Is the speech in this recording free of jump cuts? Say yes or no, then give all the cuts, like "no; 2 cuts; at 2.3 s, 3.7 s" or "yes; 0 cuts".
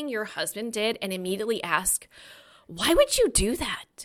yes; 0 cuts